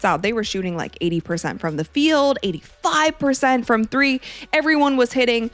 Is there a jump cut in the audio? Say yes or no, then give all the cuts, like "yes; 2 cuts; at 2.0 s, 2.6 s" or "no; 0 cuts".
no; 0 cuts